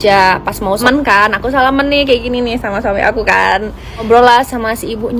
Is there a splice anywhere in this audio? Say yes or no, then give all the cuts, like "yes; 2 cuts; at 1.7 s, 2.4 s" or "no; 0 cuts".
yes; 2 cuts; at 0.8 s, 4.0 s